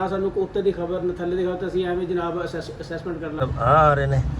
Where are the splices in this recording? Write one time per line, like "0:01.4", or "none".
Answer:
0:03.4